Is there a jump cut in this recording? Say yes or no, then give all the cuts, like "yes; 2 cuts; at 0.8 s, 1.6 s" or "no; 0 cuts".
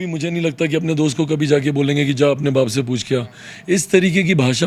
no; 0 cuts